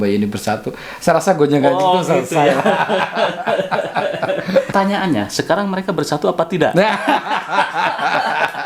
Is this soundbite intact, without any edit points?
no; 1 cut; at 4.7 s

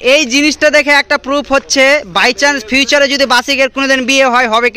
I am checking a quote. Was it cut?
no; 0 cuts

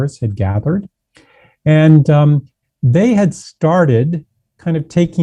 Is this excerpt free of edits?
yes; 0 cuts

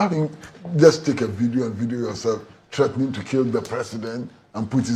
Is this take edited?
no; 0 cuts

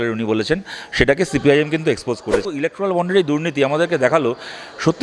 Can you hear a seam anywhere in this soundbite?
yes; 1 cut; at 2.4 s

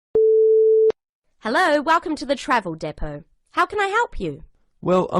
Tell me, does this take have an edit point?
yes; 1 cut; at 0.9 s

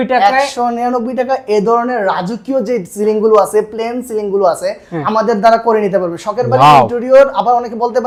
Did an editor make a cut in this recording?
no; 0 cuts

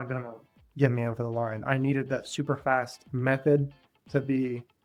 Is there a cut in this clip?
no; 0 cuts

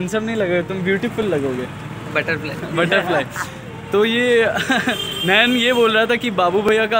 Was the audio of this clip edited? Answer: no; 0 cuts

